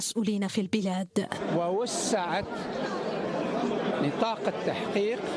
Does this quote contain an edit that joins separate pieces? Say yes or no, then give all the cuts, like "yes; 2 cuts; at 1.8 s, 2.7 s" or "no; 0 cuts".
yes; 1 cut; at 3.7 s